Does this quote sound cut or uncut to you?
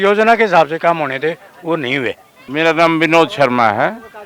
uncut